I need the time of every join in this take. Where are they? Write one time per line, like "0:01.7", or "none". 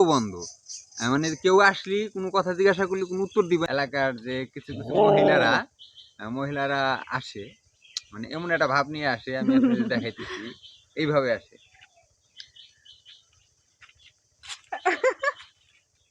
0:03.7